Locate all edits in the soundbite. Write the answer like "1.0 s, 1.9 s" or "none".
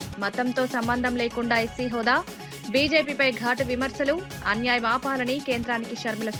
none